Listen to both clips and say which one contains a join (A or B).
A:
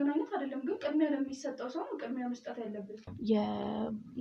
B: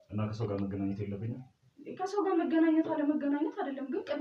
A